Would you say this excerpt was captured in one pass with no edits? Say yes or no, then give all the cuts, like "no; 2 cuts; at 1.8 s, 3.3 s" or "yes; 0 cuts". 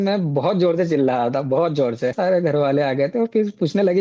no; 1 cut; at 2.2 s